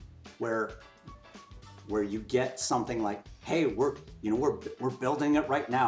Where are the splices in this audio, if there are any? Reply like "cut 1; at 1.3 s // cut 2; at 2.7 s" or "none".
none